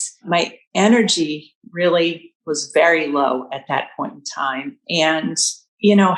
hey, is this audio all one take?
yes; 0 cuts

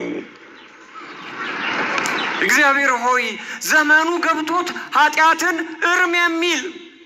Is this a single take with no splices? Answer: yes; 0 cuts

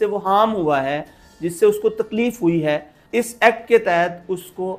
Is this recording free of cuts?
yes; 0 cuts

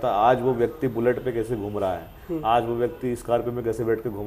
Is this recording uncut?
yes; 0 cuts

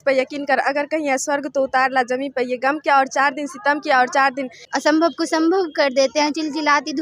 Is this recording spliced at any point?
yes; 1 cut; at 4.6 s

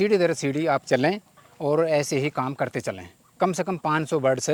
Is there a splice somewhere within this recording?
no; 0 cuts

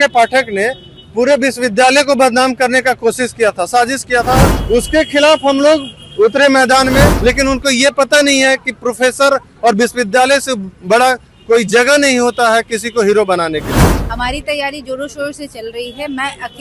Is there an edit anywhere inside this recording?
yes; 3 cuts; at 4.5 s, 7.1 s, 14.0 s

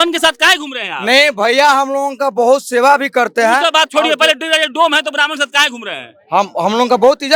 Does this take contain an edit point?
no; 0 cuts

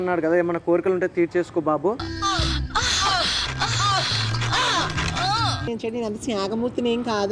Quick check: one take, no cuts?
no; 1 cut; at 5.6 s

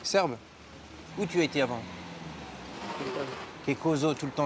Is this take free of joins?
yes; 0 cuts

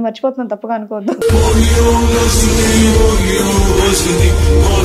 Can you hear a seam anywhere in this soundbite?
no; 0 cuts

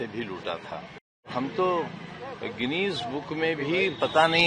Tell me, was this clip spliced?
yes; 1 cut; at 1.3 s

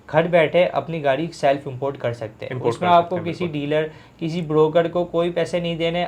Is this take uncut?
yes; 0 cuts

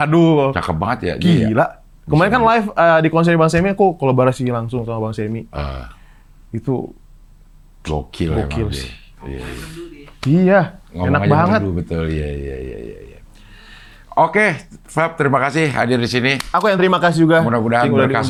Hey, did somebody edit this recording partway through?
no; 0 cuts

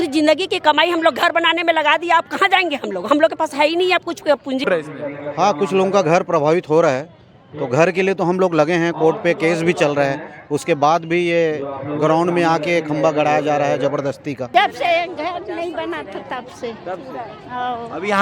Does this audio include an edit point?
yes; 2 cuts; at 4.7 s, 14.5 s

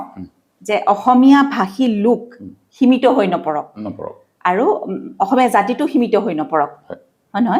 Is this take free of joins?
yes; 0 cuts

